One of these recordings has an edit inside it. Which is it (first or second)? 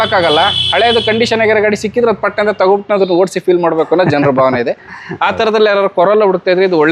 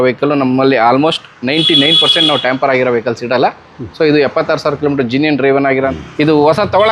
second